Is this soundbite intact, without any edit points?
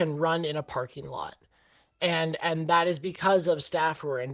yes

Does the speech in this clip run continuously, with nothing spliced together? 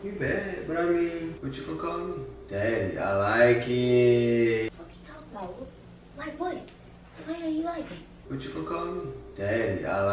no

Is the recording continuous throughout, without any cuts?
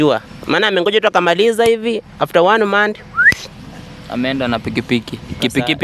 yes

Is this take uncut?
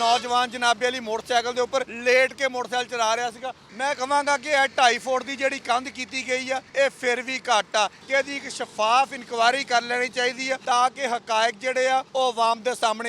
no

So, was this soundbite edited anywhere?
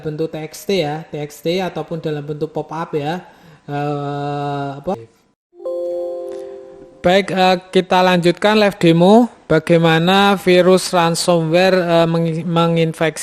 yes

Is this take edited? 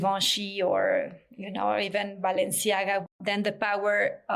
yes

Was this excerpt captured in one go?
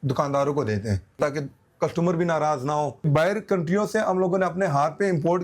no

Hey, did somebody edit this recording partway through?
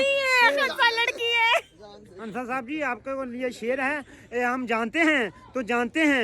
no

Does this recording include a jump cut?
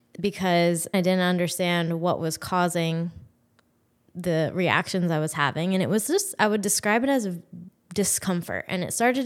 yes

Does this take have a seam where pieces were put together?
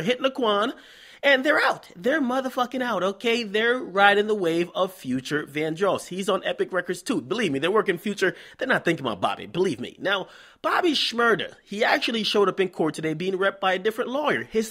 no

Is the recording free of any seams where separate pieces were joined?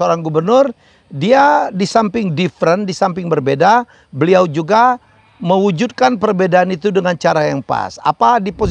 yes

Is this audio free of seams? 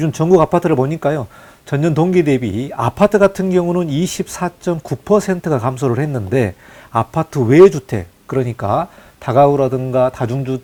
yes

